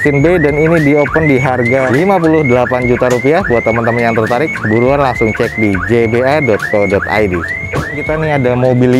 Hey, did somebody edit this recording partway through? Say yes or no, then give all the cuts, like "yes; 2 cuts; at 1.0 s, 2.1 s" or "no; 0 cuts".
no; 0 cuts